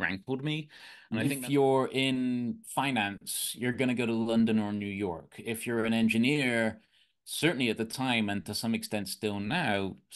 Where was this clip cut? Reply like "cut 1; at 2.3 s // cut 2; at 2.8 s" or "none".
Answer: cut 1; at 1.3 s

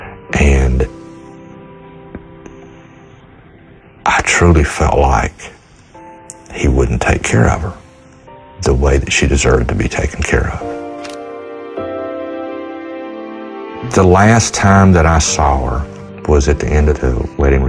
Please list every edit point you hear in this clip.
cut 1; at 13.9 s

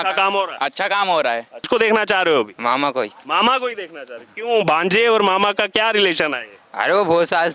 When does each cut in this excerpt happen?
cut 1; at 1.6 s

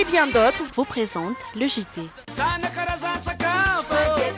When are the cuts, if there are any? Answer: cut 1; at 2.2 s

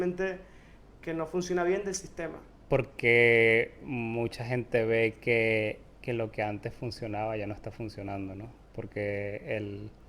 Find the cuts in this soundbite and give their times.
cut 1; at 2.5 s

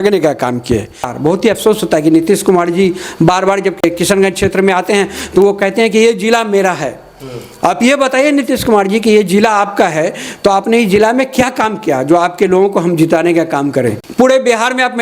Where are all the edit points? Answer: cut 1; at 1.1 s // cut 2; at 3.8 s // cut 3; at 14.0 s

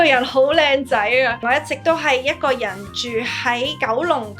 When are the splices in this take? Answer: cut 1; at 1.4 s

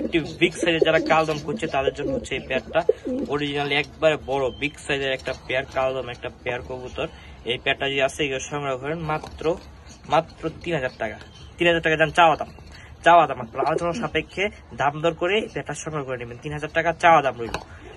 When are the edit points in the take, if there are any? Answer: none

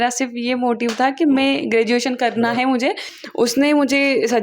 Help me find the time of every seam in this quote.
cut 1; at 3.1 s

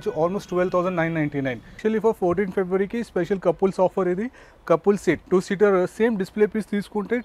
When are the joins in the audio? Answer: cut 1; at 1.8 s

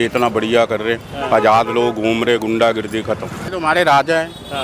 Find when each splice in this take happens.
cut 1; at 3.5 s

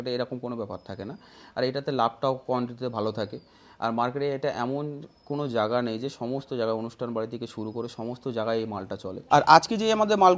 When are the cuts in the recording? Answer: cut 1; at 9.2 s

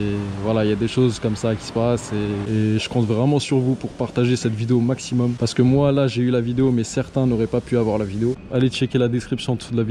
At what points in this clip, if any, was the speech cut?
cut 1; at 2.5 s // cut 2; at 5.4 s // cut 3; at 8.4 s

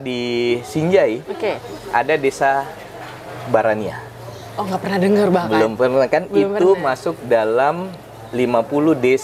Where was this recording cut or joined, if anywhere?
none

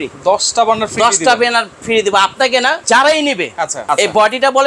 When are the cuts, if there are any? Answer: cut 1; at 2.8 s // cut 2; at 3.8 s

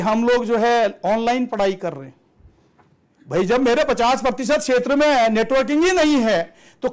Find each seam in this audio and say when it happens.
none

